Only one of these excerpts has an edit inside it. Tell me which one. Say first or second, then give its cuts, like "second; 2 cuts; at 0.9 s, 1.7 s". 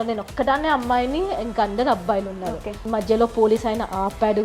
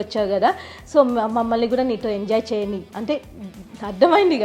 first; 1 cut; at 2.8 s